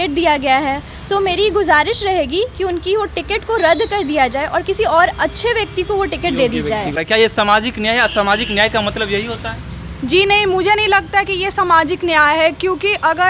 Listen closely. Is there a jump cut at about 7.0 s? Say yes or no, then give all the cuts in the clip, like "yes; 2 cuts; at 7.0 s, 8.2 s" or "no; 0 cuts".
yes; 1 cut; at 7.0 s